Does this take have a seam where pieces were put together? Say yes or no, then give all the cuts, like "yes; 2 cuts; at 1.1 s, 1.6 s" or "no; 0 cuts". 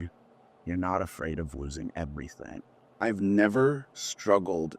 yes; 1 cut; at 2.8 s